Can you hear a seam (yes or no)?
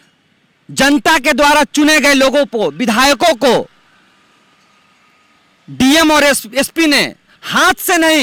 no